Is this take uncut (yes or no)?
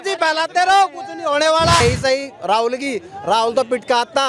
no